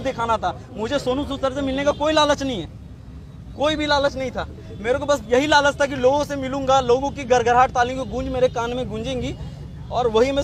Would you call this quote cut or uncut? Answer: uncut